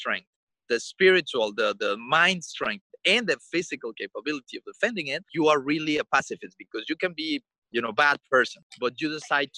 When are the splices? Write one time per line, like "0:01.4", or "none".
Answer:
0:05.3
0:07.6
0:08.6